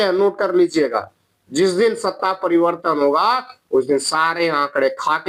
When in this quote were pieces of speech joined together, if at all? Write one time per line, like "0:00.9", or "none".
none